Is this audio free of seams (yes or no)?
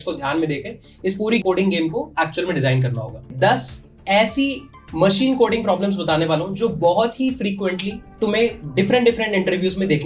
no